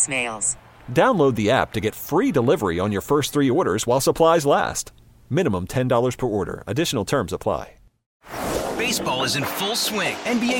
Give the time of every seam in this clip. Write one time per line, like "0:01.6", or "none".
0:08.1